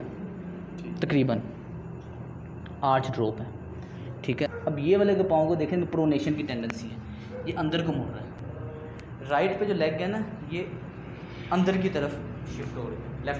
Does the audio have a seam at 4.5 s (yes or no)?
yes